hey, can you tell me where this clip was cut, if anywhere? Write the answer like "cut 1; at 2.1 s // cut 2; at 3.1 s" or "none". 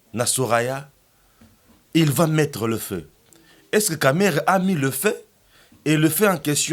none